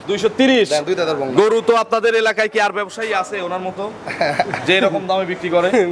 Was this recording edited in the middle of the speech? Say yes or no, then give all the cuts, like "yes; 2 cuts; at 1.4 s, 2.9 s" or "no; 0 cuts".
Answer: no; 0 cuts